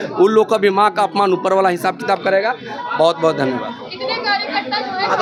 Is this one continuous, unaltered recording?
yes; 0 cuts

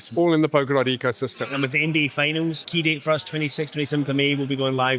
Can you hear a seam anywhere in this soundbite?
yes; 2 cuts; at 1.5 s, 2.6 s

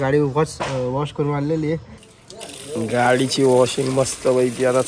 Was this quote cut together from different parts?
yes; 1 cut; at 2.0 s

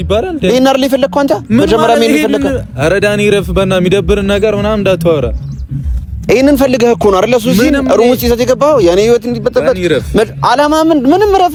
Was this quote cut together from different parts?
no; 0 cuts

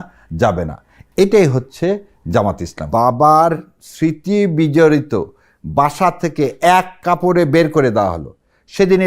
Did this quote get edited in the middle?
yes; 1 cut; at 2.8 s

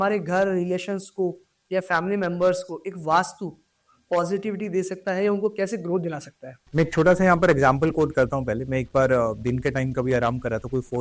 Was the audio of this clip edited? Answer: no; 0 cuts

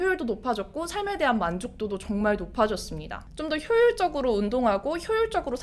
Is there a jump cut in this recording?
yes; 1 cut; at 3.2 s

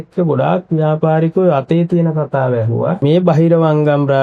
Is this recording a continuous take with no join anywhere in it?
no; 1 cut; at 3.0 s

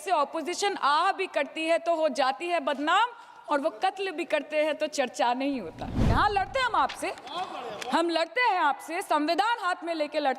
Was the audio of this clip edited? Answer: yes; 1 cut; at 6.0 s

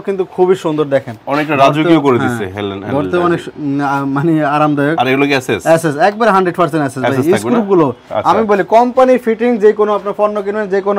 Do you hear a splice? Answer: no; 0 cuts

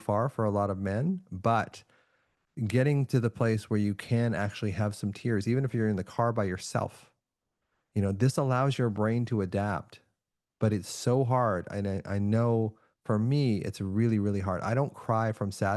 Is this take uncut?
yes; 0 cuts

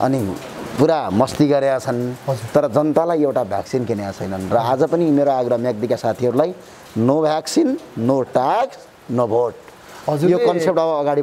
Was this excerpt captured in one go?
yes; 0 cuts

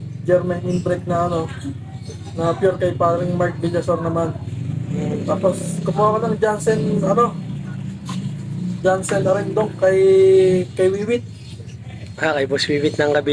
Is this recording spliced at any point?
no; 0 cuts

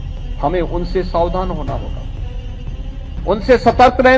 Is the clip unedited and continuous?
no; 2 cuts; at 1.9 s, 3.2 s

